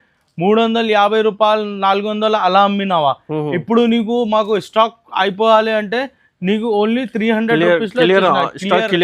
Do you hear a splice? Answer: no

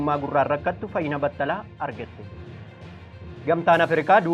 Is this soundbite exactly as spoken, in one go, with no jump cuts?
yes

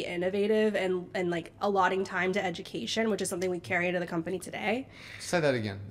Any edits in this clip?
no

